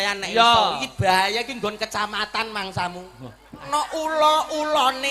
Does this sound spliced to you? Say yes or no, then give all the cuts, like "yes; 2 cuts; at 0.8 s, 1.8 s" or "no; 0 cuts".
yes; 1 cut; at 3.7 s